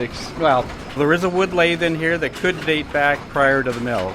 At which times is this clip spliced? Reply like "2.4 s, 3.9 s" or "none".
1.0 s, 3.3 s